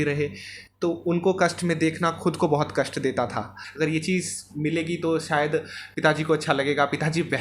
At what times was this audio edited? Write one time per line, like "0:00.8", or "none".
0:03.6